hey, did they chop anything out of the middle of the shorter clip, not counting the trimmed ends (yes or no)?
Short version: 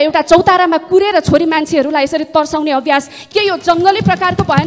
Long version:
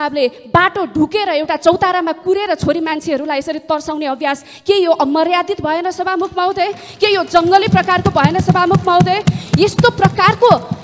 yes